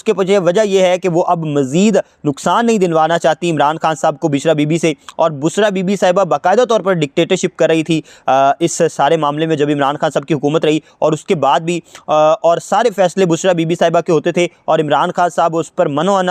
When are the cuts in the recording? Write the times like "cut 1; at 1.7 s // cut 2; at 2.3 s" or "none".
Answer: none